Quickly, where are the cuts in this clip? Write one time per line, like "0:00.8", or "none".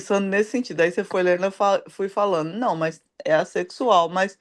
none